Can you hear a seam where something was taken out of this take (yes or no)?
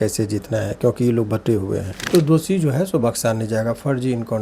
yes